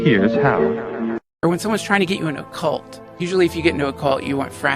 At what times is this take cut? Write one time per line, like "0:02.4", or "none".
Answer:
0:01.3

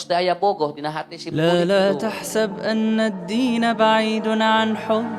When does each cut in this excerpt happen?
0:01.4

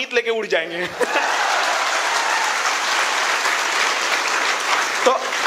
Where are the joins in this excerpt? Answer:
none

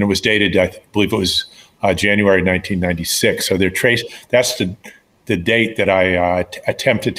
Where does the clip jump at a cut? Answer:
none

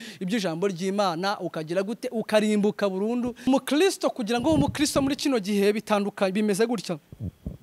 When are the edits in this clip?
0:03.5

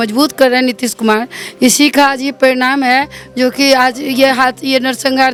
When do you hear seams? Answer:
none

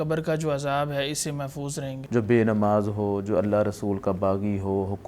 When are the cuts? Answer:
0:01.9

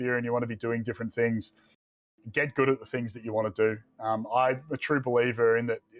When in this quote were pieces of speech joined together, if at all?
0:01.9

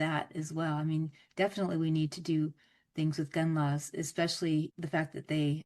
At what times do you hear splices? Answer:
0:04.7

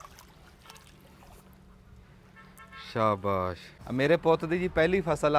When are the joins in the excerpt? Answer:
0:03.7

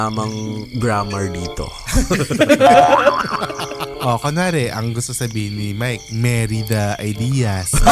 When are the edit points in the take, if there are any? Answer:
0:03.9

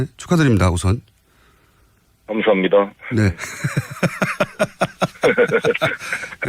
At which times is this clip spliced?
none

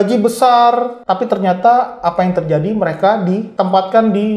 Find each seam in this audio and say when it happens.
0:01.0
0:03.5

